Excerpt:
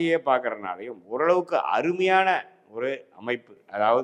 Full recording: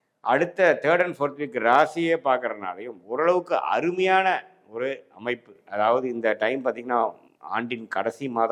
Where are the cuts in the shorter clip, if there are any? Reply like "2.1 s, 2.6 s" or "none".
none